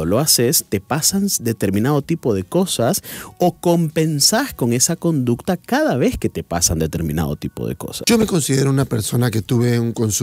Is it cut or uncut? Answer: cut